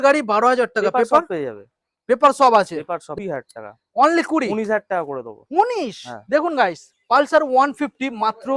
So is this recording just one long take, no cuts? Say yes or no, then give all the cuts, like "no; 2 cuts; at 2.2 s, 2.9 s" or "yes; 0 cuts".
no; 1 cut; at 3.1 s